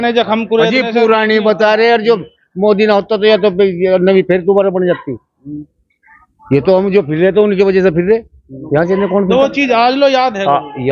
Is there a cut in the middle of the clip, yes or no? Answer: no